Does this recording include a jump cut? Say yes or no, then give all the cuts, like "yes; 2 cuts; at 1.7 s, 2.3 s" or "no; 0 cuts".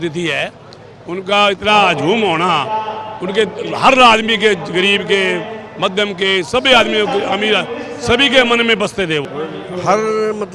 yes; 1 cut; at 9.3 s